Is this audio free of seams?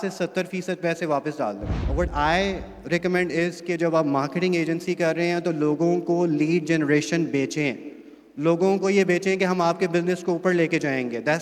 no; 1 cut; at 1.8 s

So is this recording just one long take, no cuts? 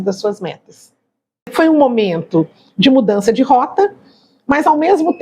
no; 1 cut; at 1.5 s

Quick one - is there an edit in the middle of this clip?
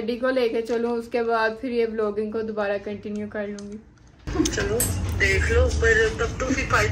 no; 0 cuts

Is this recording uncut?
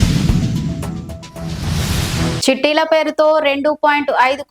no; 1 cut; at 2.4 s

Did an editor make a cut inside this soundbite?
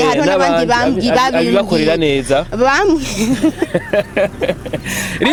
no; 0 cuts

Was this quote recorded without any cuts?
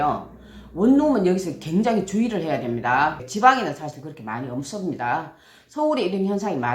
no; 1 cut; at 3.2 s

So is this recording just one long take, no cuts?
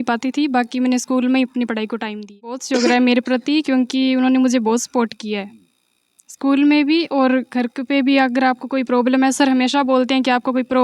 no; 1 cut; at 2.6 s

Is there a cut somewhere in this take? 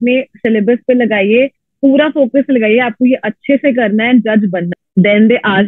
yes; 1 cut; at 4.7 s

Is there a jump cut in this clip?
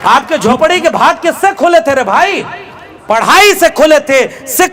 no; 0 cuts

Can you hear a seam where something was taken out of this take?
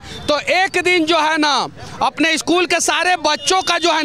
no; 0 cuts

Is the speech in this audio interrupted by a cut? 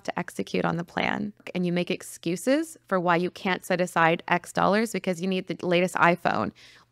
yes; 1 cut; at 1.5 s

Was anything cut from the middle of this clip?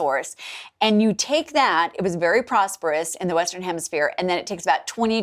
no; 0 cuts

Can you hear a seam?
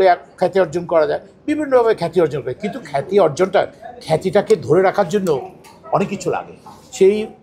no; 0 cuts

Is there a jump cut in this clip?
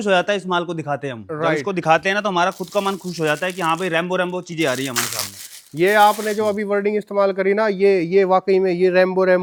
no; 0 cuts

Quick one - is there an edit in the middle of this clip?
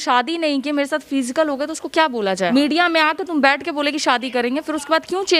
yes; 1 cut; at 2.5 s

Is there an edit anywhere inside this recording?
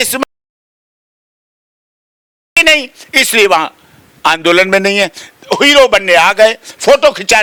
no; 0 cuts

